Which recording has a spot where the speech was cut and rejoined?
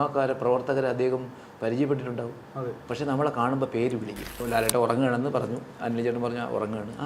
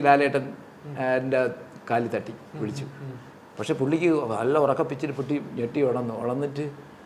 first; 1 cut; at 4.4 s

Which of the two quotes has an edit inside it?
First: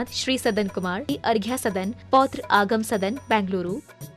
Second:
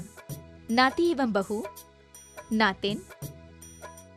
first; 1 cut; at 1.1 s

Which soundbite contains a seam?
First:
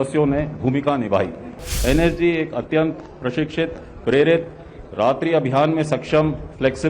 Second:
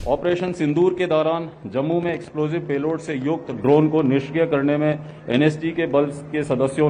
first; 1 cut; at 1.7 s

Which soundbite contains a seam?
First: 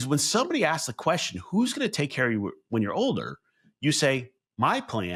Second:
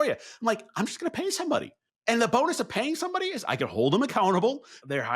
second; 1 cut; at 1.8 s

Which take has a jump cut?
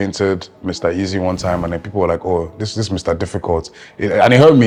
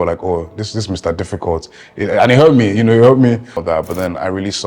second; 1 cut; at 3.6 s

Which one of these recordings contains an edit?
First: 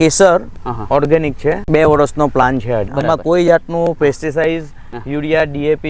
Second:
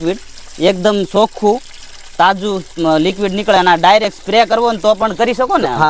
first; 2 cuts; at 1.6 s, 2.9 s

